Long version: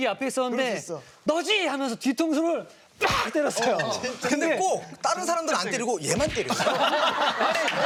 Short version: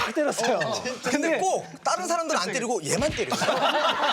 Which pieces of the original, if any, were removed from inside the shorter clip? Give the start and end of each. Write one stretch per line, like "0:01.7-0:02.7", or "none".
none